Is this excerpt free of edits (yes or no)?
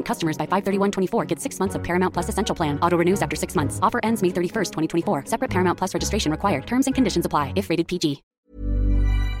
no